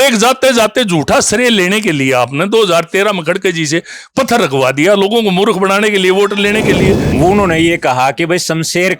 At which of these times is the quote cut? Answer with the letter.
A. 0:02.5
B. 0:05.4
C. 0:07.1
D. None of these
C